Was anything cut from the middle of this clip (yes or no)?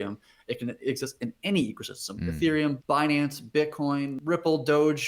yes